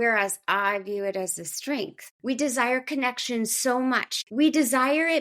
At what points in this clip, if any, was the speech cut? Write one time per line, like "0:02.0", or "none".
0:02.1
0:04.2

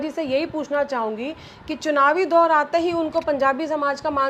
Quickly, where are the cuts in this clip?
none

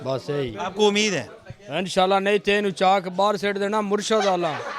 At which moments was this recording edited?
none

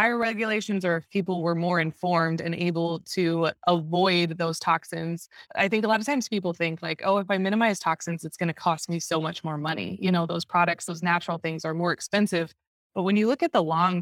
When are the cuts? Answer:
0:05.4

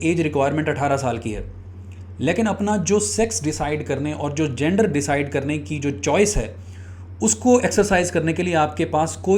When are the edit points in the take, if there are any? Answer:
none

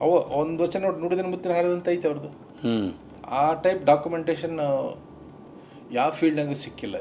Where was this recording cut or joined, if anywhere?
0:03.1

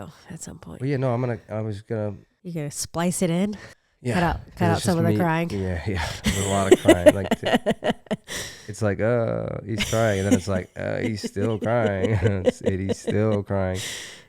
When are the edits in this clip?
0:03.6

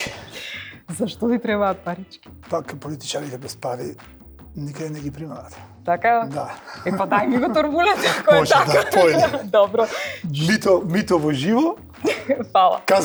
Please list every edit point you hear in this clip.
none

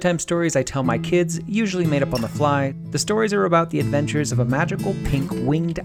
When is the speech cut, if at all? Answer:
0:02.8

